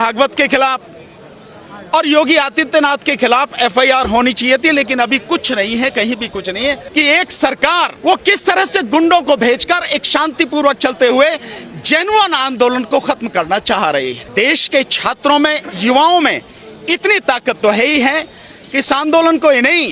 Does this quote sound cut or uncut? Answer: cut